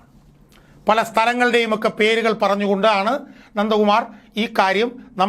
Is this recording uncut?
yes; 0 cuts

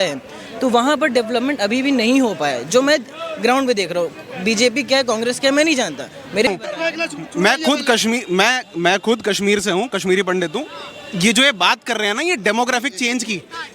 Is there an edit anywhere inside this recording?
yes; 1 cut; at 6.5 s

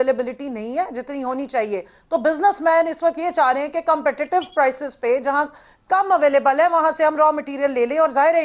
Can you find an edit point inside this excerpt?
no; 0 cuts

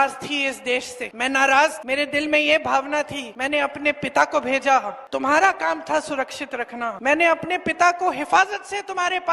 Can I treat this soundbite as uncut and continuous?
no; 5 cuts; at 1.0 s, 1.8 s, 3.3 s, 5.0 s, 7.0 s

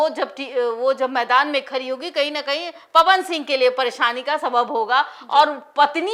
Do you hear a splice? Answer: no; 0 cuts

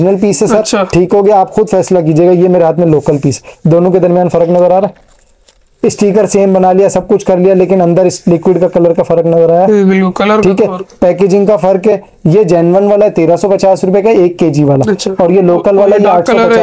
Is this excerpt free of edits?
yes; 0 cuts

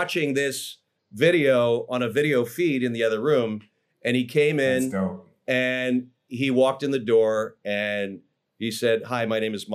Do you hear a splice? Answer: no; 0 cuts

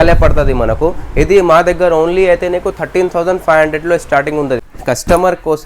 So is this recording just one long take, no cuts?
no; 1 cut; at 4.7 s

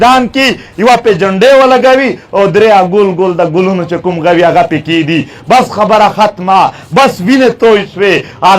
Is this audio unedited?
yes; 0 cuts

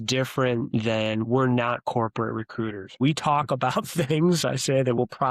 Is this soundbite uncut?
no; 1 cut; at 3.0 s

